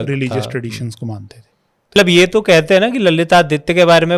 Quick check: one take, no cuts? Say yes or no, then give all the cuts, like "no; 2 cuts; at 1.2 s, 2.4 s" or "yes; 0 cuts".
no; 1 cut; at 2.0 s